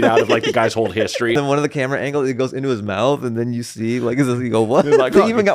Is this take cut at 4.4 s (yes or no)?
no